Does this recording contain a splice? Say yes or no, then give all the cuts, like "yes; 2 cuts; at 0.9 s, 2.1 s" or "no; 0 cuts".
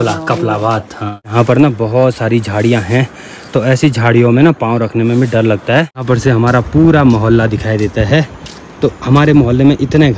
yes; 2 cuts; at 1.3 s, 6.0 s